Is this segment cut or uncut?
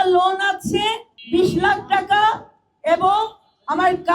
cut